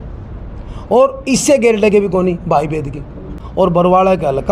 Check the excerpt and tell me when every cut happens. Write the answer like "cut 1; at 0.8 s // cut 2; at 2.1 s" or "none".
cut 1; at 3.4 s